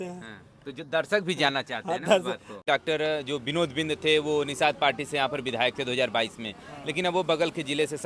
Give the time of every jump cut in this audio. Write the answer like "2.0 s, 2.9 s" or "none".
2.6 s